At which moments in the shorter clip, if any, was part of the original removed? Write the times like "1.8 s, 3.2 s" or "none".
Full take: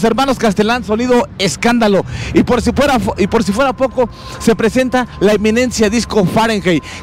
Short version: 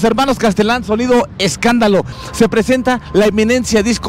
2.2 s